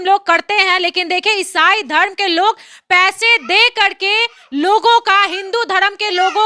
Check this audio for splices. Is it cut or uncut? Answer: uncut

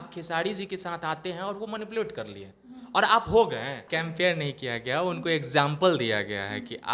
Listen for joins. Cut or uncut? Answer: cut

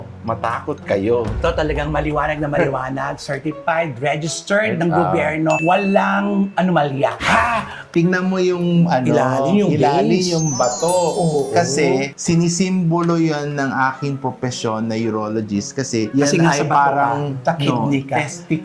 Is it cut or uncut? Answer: cut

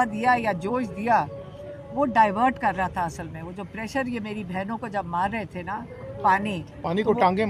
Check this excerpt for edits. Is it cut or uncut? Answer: uncut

